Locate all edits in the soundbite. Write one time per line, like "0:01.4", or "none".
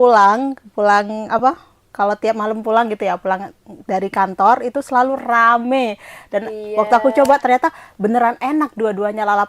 none